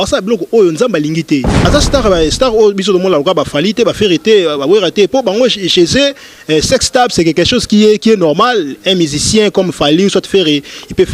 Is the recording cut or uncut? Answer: cut